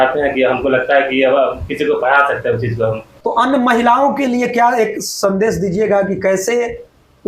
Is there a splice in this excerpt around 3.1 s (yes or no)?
yes